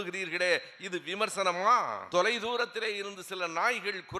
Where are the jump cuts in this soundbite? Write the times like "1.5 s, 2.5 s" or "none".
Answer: 2.0 s